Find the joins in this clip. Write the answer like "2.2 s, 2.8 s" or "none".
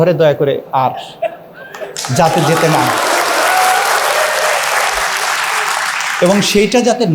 none